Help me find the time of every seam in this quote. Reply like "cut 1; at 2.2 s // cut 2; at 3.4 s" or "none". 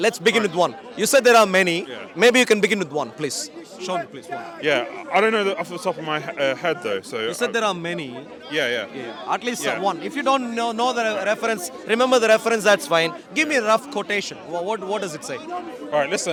none